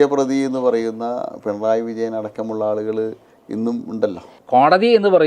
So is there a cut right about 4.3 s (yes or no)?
yes